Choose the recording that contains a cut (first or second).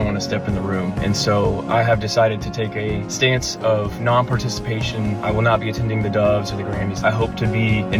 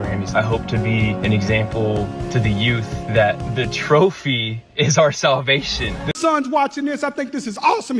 second